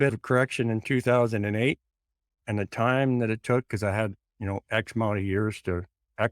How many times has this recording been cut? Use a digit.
1